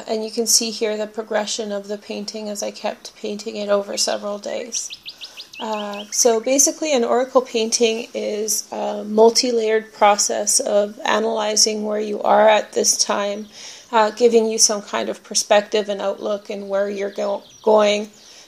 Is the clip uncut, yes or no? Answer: yes